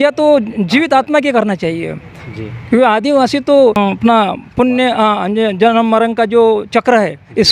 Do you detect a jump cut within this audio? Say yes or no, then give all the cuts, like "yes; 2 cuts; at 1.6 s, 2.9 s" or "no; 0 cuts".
yes; 1 cut; at 3.8 s